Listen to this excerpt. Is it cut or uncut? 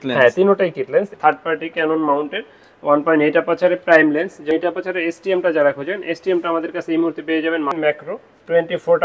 cut